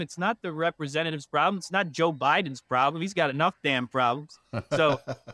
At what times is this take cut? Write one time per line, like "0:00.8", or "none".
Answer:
none